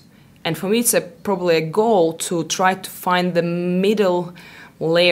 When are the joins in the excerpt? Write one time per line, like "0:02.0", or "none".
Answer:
none